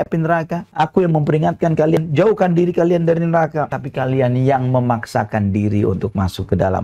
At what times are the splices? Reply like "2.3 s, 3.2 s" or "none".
2.0 s, 3.7 s